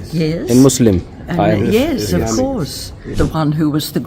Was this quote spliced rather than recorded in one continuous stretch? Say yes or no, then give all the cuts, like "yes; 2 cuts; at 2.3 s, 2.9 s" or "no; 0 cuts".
yes; 1 cut; at 3.1 s